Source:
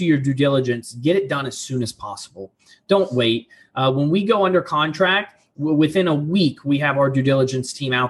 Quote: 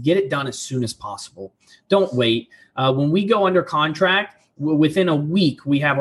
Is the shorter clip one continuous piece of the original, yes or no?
yes